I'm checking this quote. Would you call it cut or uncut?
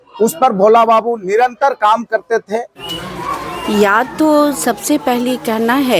uncut